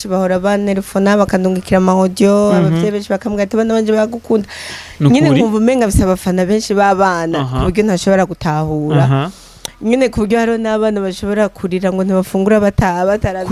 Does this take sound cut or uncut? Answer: uncut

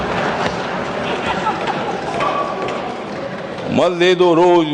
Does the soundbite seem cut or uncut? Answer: uncut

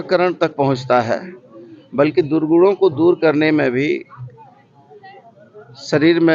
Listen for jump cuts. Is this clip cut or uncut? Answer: uncut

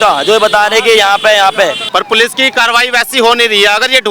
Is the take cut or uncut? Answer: cut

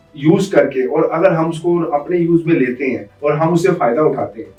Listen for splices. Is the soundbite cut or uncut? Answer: uncut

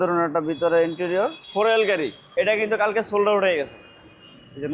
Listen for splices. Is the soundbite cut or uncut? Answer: cut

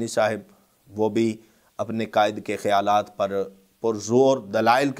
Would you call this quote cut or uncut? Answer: uncut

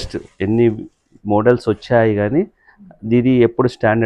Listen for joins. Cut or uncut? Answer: uncut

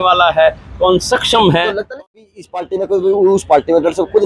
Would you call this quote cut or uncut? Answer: cut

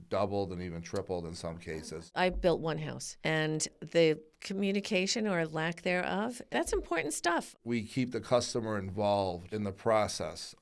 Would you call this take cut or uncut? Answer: cut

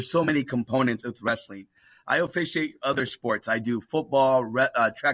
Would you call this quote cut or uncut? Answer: uncut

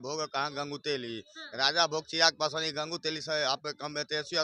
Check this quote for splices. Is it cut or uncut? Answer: uncut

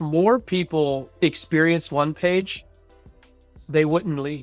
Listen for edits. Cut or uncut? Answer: cut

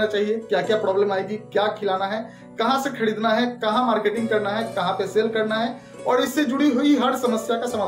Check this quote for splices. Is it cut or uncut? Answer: uncut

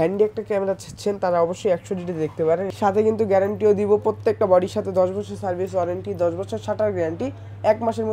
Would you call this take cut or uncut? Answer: cut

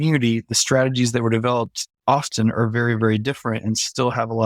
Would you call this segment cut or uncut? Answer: uncut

